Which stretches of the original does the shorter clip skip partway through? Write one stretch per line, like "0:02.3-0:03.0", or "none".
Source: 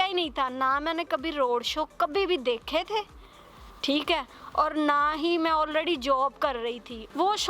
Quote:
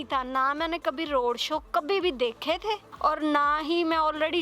0:03.1-0:04.4

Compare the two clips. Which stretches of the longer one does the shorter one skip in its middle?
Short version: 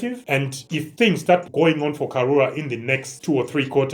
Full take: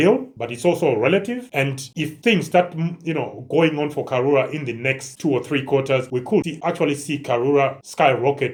0:02.7-0:03.4

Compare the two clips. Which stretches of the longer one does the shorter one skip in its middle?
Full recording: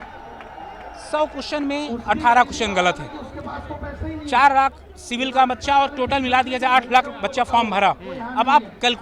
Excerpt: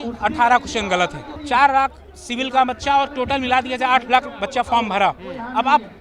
0:03.1-0:04.1

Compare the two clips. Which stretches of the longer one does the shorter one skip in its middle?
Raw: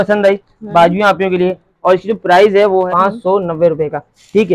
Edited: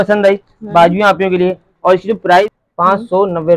0:02.5-0:02.7

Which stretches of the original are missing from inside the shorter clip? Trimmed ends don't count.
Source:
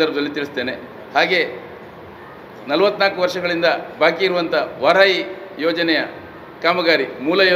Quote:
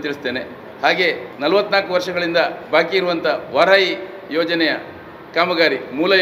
0:01.6-0:02.6

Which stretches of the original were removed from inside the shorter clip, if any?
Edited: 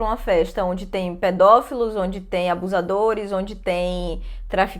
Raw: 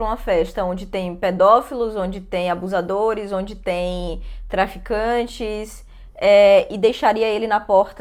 none

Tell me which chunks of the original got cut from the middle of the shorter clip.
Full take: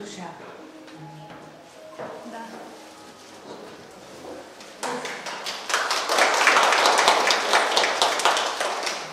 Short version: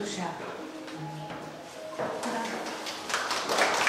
0:02.9-0:05.5

